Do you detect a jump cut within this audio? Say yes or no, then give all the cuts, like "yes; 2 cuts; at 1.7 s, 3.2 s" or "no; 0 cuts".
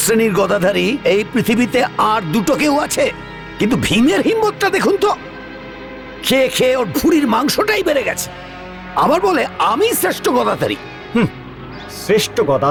no; 0 cuts